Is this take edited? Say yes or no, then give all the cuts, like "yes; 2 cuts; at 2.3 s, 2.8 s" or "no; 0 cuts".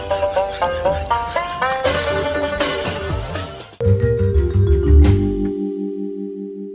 yes; 1 cut; at 3.6 s